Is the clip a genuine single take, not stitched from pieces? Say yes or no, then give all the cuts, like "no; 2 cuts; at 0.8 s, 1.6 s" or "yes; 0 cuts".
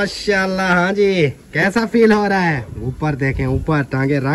yes; 0 cuts